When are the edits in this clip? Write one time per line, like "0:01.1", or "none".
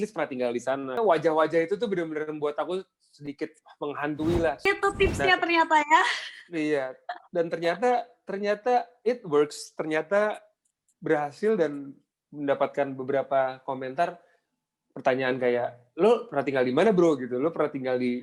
0:01.0
0:04.7